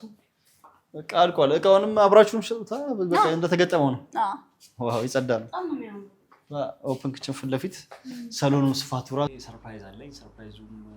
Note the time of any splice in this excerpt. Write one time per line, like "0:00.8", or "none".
0:09.3